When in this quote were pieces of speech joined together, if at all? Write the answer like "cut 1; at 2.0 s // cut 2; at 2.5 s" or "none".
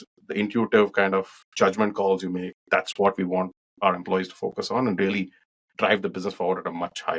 none